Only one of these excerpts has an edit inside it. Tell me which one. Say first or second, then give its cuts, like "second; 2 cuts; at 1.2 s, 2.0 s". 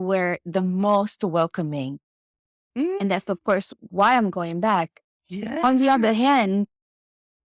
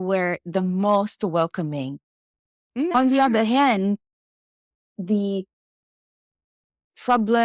second; 1 cut; at 2.9 s